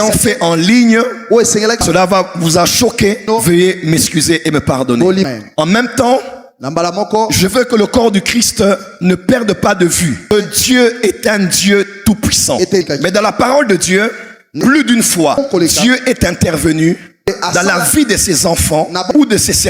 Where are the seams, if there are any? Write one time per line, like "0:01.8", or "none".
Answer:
0:01.8
0:03.2
0:05.3
0:10.3
0:12.9